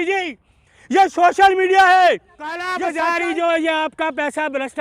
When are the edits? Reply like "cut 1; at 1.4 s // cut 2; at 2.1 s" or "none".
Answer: cut 1; at 2.8 s